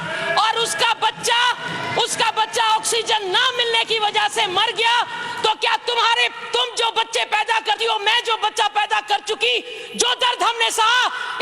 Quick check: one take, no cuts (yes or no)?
yes